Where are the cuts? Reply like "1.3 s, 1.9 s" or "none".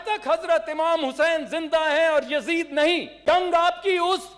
3.2 s